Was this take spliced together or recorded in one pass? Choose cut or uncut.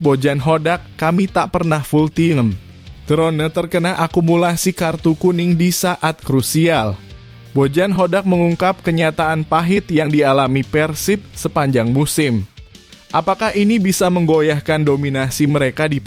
uncut